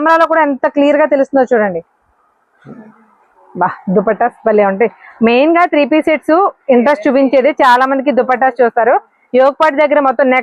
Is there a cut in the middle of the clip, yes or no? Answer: no